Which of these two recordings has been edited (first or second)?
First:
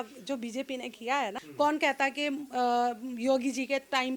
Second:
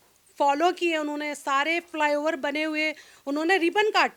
first